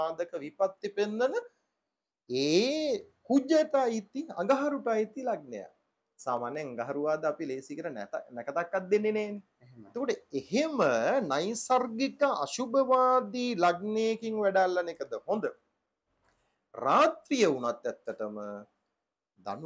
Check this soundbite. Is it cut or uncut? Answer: uncut